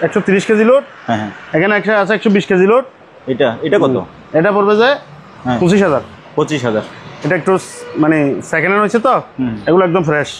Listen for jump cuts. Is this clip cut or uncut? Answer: uncut